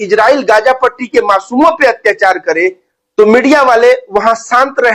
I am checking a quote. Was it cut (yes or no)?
no